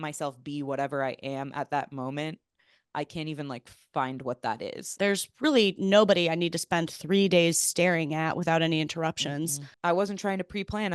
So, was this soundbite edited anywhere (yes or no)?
yes